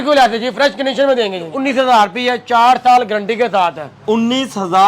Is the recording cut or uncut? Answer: cut